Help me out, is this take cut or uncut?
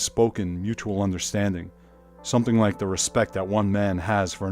cut